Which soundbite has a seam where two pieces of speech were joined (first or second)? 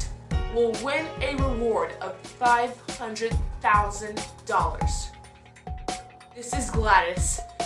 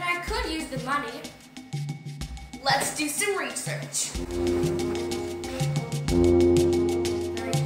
first